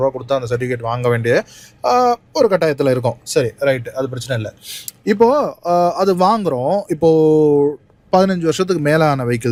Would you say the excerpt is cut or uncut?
uncut